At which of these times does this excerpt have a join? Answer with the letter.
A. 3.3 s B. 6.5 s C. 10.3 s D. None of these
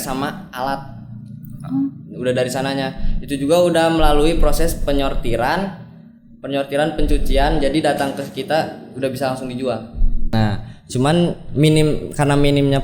C